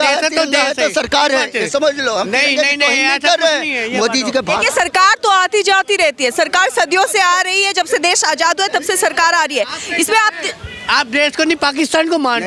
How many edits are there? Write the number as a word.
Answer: zero